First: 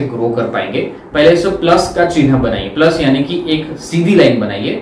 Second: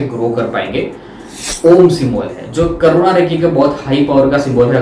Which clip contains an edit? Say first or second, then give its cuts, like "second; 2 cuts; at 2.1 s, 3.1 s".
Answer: first; 1 cut; at 1.0 s